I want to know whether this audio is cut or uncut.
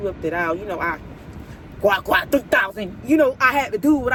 uncut